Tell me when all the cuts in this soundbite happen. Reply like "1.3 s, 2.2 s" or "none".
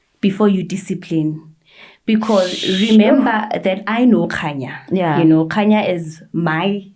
none